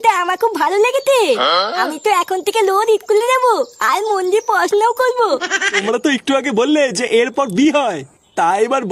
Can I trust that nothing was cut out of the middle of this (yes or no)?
no